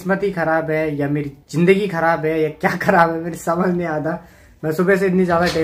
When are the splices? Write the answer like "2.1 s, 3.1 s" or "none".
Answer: none